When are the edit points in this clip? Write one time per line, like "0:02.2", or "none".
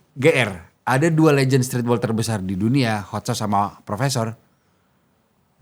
none

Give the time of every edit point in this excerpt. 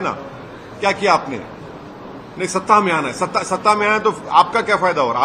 none

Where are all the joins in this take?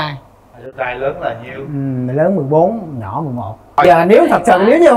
0:03.8

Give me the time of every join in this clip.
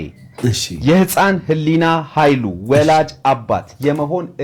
none

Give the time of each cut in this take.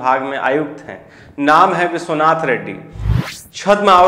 none

